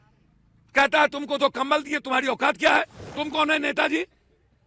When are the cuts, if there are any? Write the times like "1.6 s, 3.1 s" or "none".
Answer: 3.0 s